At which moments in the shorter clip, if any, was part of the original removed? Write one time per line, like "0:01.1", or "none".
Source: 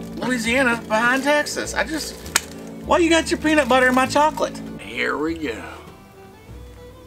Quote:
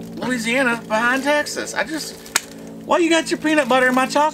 none